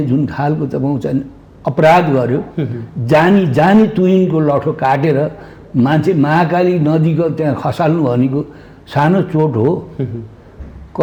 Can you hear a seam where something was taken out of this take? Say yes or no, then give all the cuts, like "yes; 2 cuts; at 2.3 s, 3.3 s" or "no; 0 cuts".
no; 0 cuts